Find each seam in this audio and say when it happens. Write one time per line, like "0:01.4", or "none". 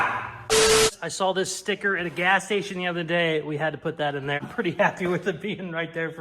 0:00.7
0:04.4